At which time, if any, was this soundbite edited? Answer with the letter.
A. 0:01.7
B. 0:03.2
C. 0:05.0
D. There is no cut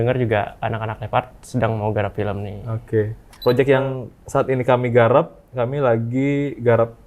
B